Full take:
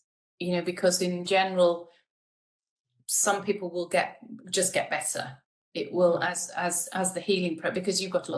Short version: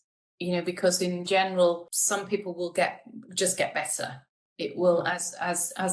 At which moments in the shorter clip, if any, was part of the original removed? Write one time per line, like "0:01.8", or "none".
0:01.9